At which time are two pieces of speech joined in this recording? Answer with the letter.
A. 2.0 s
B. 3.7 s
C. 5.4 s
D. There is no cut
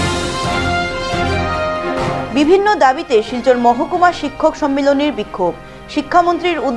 D